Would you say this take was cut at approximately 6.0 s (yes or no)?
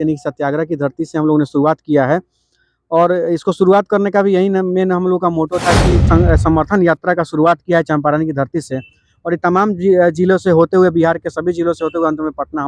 yes